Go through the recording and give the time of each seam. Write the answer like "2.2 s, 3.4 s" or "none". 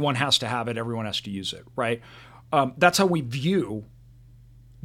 none